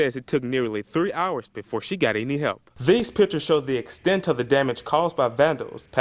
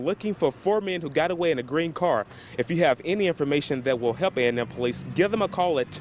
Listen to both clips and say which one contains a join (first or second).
first